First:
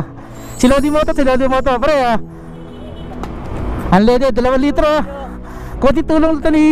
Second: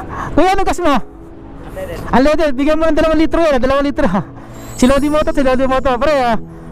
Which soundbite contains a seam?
second; 1 cut; at 2.1 s

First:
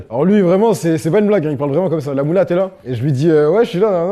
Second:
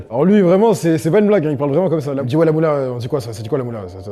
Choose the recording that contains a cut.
second; 1 cut; at 2.2 s

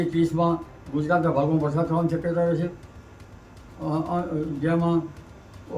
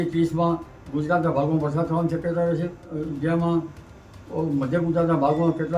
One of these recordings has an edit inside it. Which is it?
second; 1 cut; at 2.9 s

